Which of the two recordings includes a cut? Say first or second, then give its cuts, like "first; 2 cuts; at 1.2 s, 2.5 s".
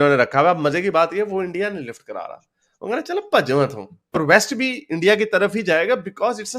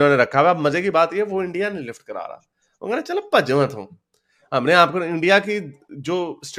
first; 1 cut; at 4.2 s